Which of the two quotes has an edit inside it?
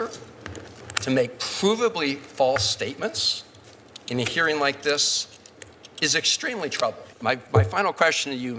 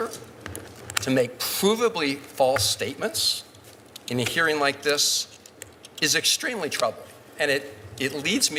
first; 1 cut; at 7.1 s

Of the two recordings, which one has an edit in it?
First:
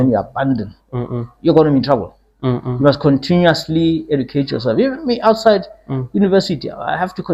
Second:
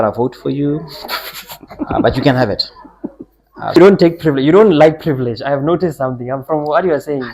second; 1 cut; at 3.8 s

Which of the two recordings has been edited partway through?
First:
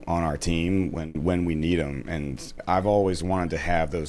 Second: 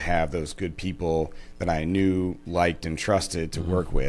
first; 1 cut; at 2.6 s

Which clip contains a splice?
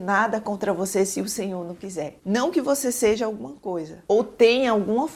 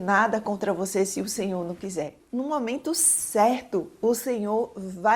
second; 1 cut; at 2.1 s

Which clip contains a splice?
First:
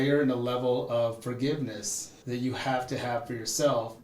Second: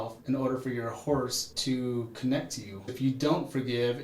second; 2 cuts; at 1.5 s, 2.9 s

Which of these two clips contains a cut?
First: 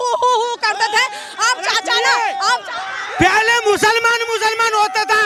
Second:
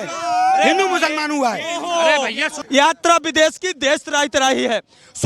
second; 1 cut; at 2.5 s

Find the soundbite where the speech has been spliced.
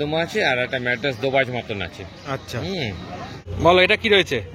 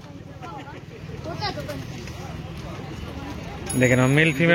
first; 1 cut; at 3.5 s

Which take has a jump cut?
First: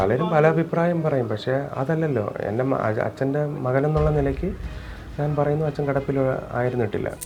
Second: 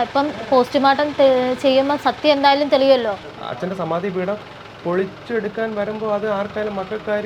second; 1 cut; at 3.4 s

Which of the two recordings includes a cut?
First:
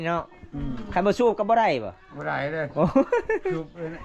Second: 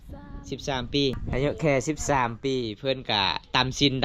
second; 1 cut; at 1.2 s

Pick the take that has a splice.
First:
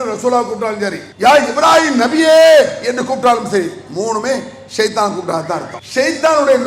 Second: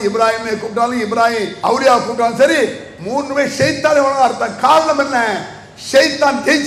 first; 2 cuts; at 1.0 s, 5.8 s

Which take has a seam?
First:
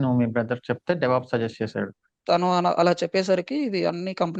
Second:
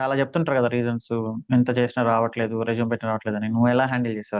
first; 1 cut; at 2.2 s

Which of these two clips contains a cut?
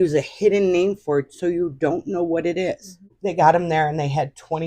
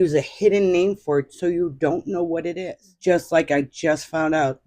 first; 1 cut; at 3.0 s

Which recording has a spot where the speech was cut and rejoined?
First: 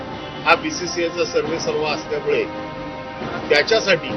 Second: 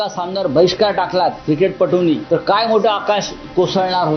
second; 1 cut; at 2.2 s

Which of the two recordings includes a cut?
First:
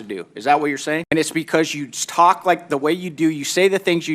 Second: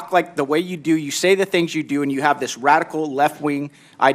first; 1 cut; at 1.1 s

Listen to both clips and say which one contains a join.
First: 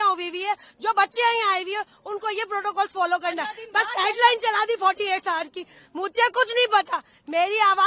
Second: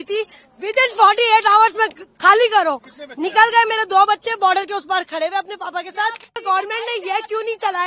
second; 1 cut; at 6.4 s

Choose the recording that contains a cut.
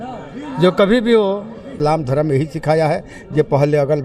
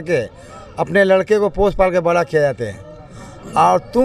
first; 1 cut; at 1.7 s

